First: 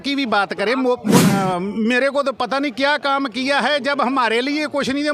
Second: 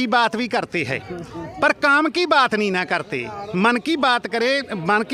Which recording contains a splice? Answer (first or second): first